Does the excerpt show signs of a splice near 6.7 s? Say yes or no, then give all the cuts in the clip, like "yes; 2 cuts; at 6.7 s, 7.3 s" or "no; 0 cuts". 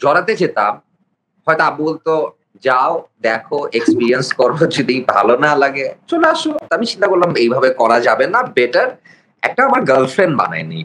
yes; 1 cut; at 6.7 s